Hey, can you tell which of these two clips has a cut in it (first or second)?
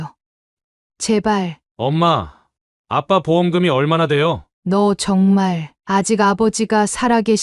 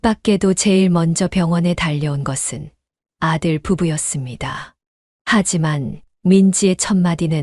first